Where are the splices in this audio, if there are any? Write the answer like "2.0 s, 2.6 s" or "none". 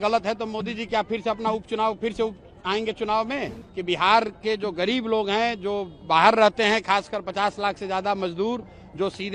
3.6 s